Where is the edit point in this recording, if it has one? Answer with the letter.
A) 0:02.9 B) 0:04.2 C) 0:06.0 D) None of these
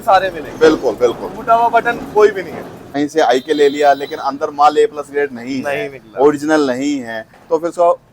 A